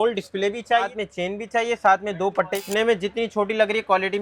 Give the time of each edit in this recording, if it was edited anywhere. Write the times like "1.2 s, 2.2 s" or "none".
0.9 s, 2.6 s